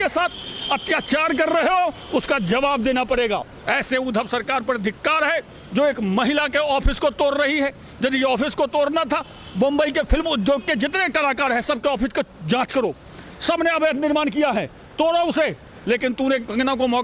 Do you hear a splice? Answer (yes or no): yes